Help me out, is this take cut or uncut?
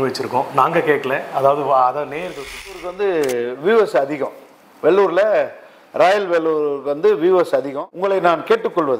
cut